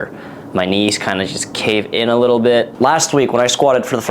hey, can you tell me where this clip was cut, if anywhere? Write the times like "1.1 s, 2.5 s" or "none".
2.7 s